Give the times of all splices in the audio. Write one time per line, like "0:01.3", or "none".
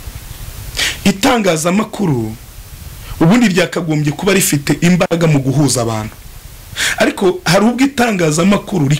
none